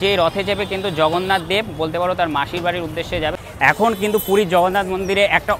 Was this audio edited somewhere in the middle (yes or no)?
yes